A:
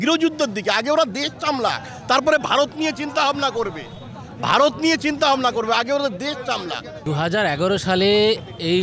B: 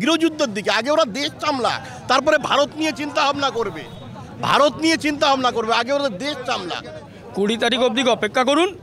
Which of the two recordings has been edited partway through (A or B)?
B